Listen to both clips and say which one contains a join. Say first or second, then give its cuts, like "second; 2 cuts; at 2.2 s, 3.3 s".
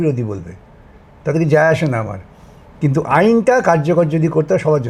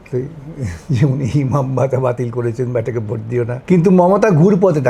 second; 1 cut; at 3.6 s